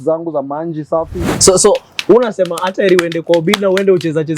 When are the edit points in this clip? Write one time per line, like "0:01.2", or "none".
0:01.3